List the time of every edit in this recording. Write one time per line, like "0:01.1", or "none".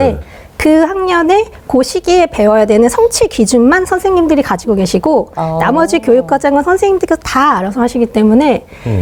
none